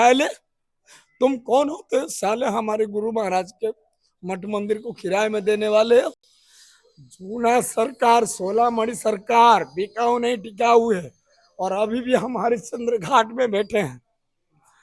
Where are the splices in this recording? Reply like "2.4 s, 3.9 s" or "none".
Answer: none